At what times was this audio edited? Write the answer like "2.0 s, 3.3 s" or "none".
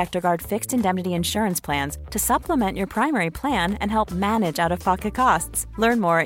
none